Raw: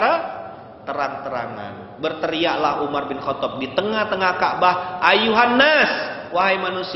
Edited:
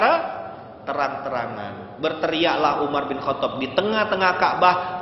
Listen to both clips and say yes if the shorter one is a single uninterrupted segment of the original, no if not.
yes